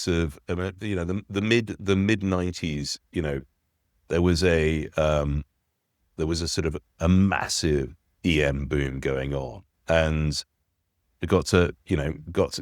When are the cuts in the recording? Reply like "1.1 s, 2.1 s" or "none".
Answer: none